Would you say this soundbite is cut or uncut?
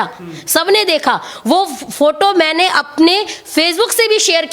uncut